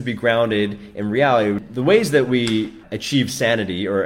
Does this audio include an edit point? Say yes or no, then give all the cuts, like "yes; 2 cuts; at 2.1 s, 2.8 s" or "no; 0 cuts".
yes; 2 cuts; at 1.7 s, 2.9 s